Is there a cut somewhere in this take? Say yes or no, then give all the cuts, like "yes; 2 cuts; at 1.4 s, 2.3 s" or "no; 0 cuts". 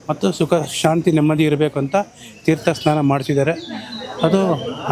no; 0 cuts